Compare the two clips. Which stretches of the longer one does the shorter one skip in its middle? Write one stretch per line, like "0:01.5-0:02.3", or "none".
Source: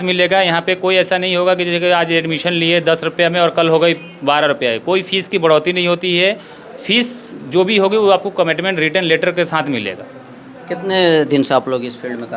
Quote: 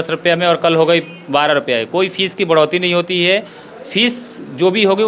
none